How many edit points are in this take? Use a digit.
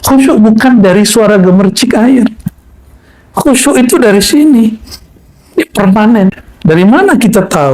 1